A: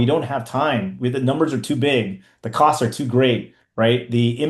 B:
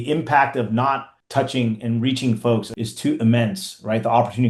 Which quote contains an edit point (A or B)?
B